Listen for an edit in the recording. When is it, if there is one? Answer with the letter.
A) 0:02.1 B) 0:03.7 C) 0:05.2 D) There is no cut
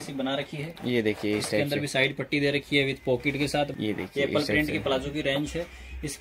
B